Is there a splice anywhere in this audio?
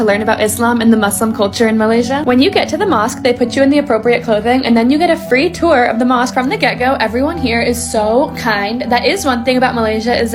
no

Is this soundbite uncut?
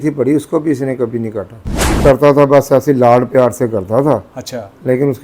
no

